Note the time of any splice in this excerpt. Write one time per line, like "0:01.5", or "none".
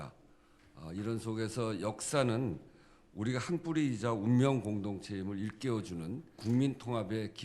0:06.4